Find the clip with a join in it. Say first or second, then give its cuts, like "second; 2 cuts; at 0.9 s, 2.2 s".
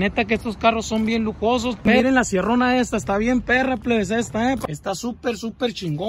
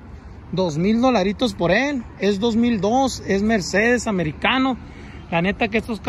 first; 2 cuts; at 1.8 s, 4.6 s